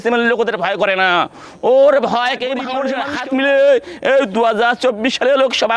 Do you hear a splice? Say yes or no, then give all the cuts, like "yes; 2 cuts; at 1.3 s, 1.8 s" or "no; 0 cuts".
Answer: yes; 1 cut; at 2.9 s